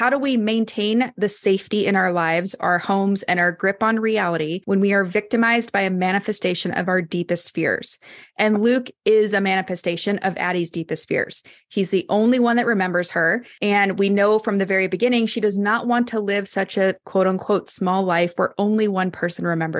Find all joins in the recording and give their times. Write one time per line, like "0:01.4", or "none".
0:04.6
0:13.5

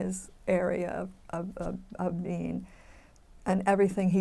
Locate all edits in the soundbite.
none

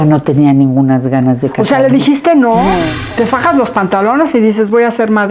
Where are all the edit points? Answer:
0:03.0

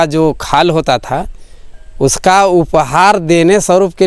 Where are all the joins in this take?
none

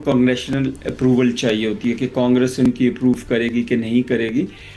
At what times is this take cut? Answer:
none

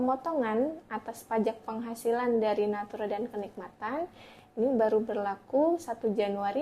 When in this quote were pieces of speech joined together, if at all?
none

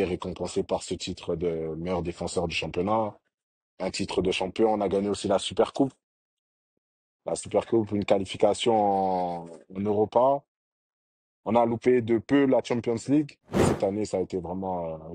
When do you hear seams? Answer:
0:13.7

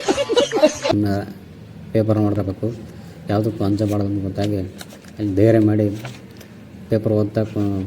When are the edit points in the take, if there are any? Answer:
0:02.4

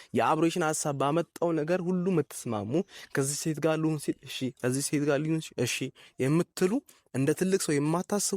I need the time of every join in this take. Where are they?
none

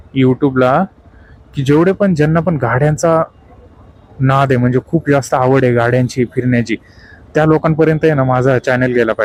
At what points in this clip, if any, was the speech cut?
none

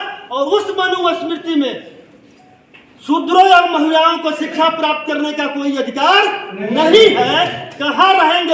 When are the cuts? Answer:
none

